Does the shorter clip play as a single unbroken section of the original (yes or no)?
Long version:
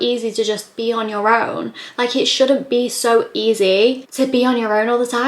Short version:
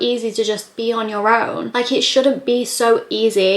no